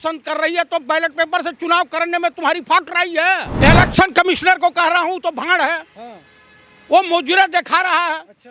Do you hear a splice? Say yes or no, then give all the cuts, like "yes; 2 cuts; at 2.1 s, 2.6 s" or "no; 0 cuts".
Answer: yes; 1 cut; at 3.5 s